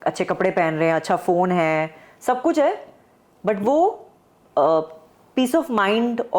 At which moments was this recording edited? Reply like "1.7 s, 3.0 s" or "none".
none